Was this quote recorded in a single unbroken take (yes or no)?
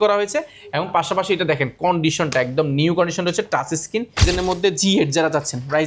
no